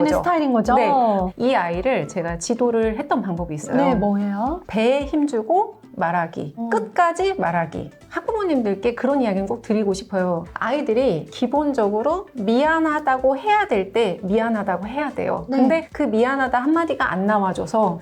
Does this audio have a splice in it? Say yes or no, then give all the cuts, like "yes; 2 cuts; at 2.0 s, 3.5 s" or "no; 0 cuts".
yes; 4 cuts; at 1.3 s, 4.6 s, 7.9 s, 15.5 s